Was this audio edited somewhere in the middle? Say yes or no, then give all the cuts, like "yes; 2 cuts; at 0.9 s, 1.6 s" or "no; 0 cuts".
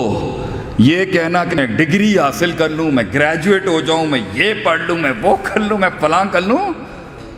yes; 1 cut; at 1.6 s